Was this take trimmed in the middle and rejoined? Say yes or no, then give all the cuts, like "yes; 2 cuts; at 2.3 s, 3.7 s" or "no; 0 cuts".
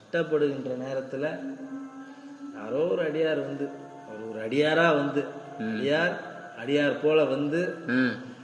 yes; 1 cut; at 4.6 s